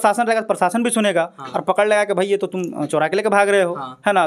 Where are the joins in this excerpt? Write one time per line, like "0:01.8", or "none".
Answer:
none

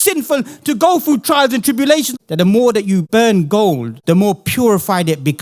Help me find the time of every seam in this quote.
0:02.1
0:03.1
0:03.9

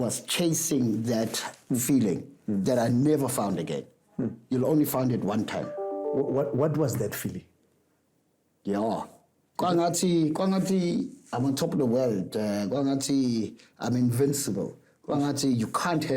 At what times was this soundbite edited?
none

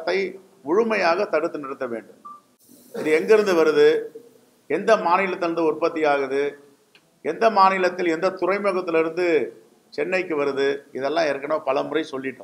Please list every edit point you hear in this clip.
none

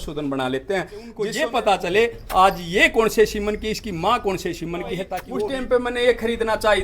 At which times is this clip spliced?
0:01.3
0:05.2

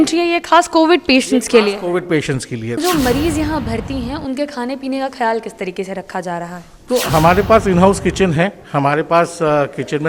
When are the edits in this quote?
0:02.8

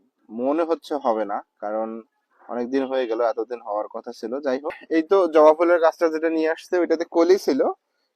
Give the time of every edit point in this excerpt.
0:04.8

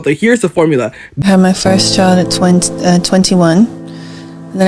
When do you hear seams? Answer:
0:01.0

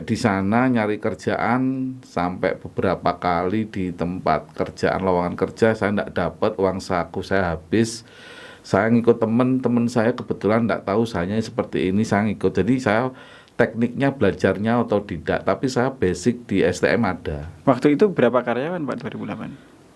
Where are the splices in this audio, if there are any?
0:17.5

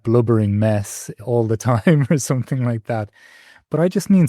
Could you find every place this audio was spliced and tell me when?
0:01.2

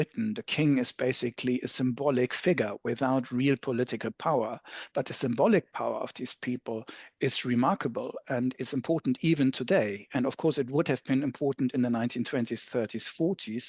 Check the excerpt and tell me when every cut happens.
none

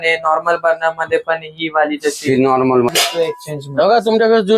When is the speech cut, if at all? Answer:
0:02.9

